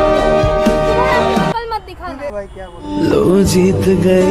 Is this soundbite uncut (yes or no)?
no